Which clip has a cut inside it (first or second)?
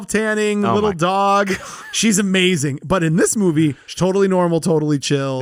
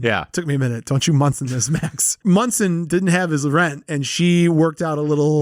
second